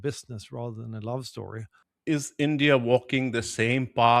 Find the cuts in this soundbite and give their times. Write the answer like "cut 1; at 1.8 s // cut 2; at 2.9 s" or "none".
cut 1; at 1.8 s